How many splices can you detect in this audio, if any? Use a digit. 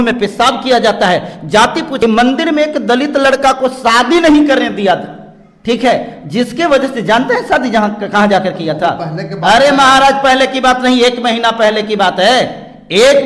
1